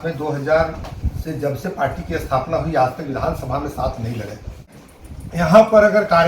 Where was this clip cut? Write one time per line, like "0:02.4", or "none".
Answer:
0:04.8

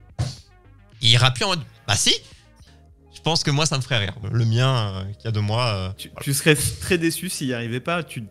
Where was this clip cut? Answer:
0:02.6
0:04.2
0:06.1

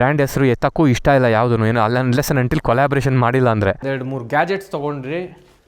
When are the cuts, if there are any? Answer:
0:03.8

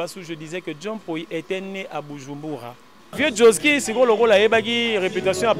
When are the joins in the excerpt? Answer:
0:03.1

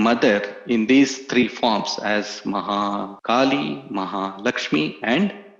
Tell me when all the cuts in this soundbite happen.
0:03.1

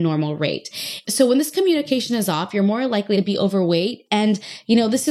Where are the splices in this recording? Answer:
0:01.0
0:03.2

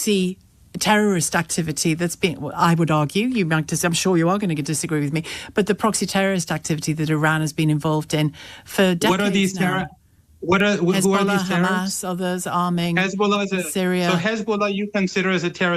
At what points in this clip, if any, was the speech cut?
none

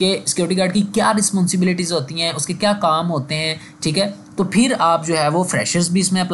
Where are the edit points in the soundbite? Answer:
none

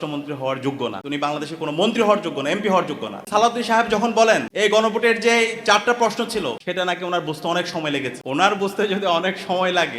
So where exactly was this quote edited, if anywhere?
0:01.0
0:03.1
0:04.5
0:06.6
0:08.2

